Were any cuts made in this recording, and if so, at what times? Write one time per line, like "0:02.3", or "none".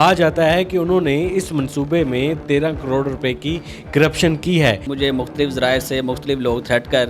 0:04.9